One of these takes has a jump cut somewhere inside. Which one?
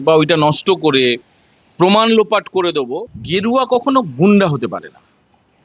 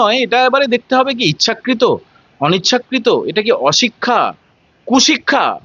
first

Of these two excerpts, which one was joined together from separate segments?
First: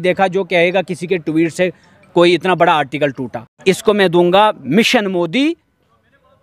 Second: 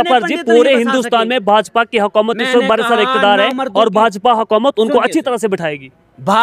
first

